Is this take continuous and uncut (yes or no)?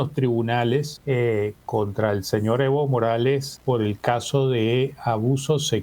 no